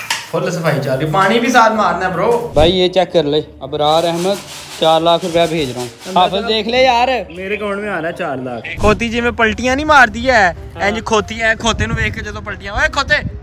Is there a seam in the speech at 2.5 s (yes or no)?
yes